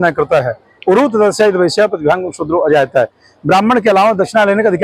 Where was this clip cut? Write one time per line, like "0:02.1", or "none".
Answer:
none